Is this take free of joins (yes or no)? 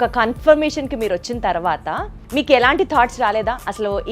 no